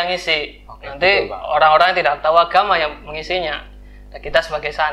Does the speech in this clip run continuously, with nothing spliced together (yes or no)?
yes